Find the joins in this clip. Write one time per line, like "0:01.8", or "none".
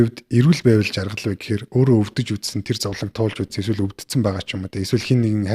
none